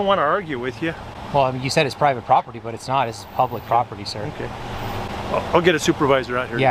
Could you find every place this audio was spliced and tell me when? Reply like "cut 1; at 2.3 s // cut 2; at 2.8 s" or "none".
none